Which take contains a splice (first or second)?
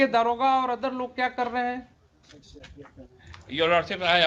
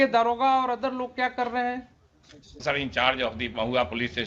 second